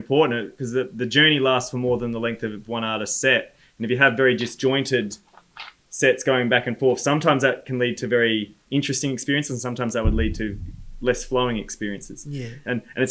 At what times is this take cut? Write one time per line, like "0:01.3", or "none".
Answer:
none